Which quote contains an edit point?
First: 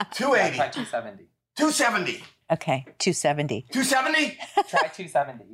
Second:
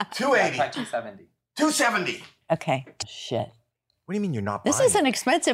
second; 1 cut; at 2.9 s

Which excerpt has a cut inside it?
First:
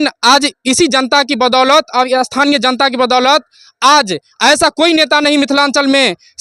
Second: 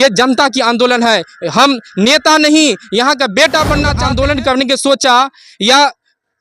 second; 1 cut; at 3.9 s

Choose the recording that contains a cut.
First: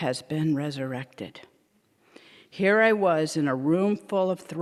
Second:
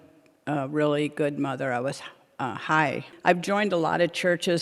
second; 1 cut; at 3.1 s

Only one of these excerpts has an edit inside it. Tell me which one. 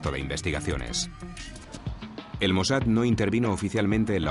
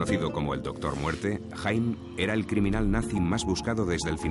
first; 1 cut; at 1.7 s

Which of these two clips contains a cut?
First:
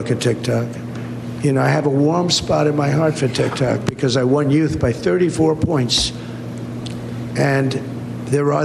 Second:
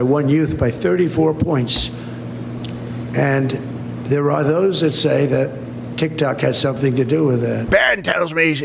second; 1 cut; at 7.7 s

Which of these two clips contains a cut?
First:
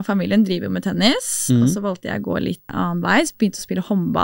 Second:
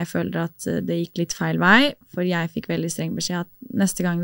first; 1 cut; at 2.7 s

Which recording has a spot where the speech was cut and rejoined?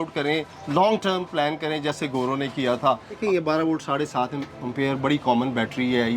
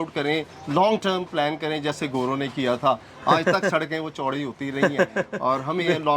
first; 1 cut; at 3.1 s

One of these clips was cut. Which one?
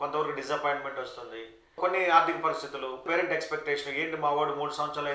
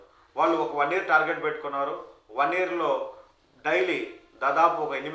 first; 2 cuts; at 1.8 s, 3.1 s

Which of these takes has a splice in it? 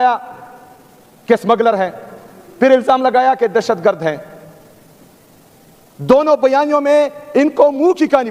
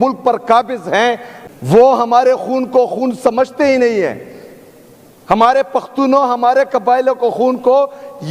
second; 1 cut; at 1.3 s

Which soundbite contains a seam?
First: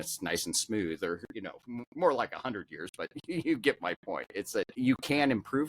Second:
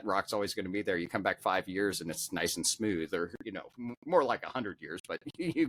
first; 1 cut; at 4.7 s

